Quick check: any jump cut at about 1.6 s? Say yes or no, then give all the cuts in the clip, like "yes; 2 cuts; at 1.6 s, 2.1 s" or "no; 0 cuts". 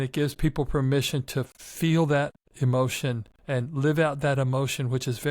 yes; 3 cuts; at 1.6 s, 2.4 s, 3.3 s